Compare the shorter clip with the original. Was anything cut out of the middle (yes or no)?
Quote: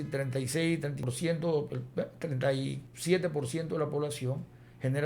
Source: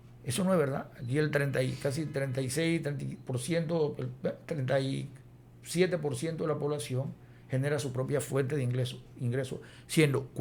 yes